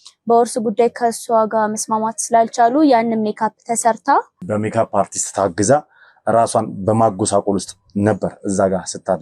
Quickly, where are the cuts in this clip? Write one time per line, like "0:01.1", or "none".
0:04.4